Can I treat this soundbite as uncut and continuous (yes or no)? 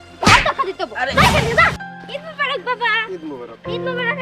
no